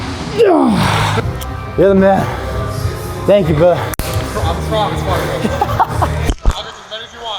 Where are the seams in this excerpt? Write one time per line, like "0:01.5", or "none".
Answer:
0:01.1